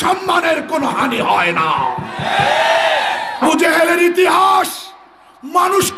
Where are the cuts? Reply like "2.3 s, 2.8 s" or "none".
3.4 s

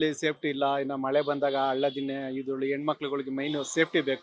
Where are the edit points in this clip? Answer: none

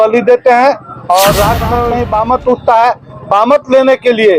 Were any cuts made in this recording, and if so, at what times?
1.9 s

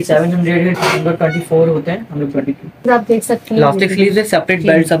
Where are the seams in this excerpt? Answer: 2.9 s

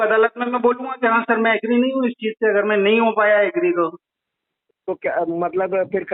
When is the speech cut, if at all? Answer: none

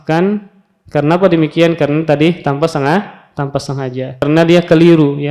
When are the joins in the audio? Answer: 4.2 s

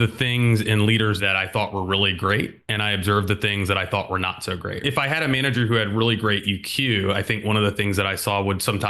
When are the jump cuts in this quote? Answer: 1.2 s, 4.8 s

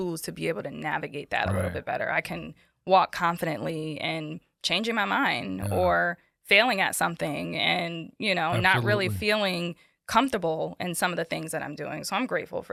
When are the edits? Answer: none

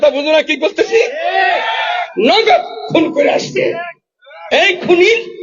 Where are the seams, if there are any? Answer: none

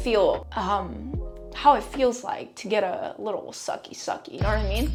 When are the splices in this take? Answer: none

